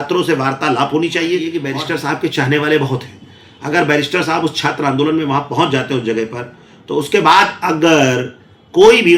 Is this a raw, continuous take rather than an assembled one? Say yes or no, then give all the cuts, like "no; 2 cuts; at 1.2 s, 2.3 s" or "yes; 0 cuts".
no; 1 cut; at 1.6 s